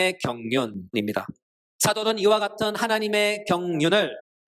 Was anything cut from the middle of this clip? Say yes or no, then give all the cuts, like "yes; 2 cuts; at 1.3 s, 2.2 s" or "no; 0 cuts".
yes; 1 cut; at 0.9 s